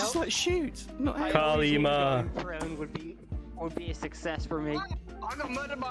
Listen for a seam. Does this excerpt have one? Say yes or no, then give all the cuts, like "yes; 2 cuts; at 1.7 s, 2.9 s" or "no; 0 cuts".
no; 0 cuts